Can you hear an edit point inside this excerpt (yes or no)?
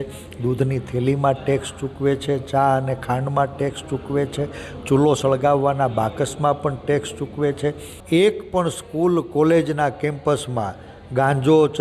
yes